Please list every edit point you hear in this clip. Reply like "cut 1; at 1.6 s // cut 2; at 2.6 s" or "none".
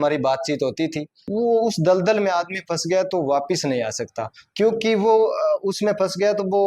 cut 1; at 1.2 s